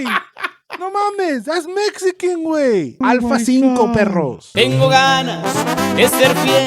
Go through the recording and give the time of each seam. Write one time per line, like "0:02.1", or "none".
0:03.0